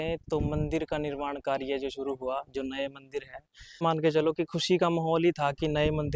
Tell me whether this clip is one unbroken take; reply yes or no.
no